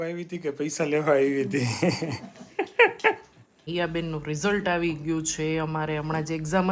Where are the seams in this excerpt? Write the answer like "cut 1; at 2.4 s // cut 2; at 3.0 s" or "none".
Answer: cut 1; at 3.6 s